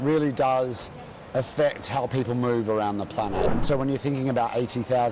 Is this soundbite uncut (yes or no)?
no